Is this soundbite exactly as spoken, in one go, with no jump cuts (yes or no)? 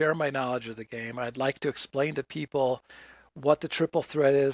yes